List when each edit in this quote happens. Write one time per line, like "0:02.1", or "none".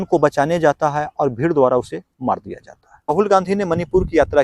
0:03.1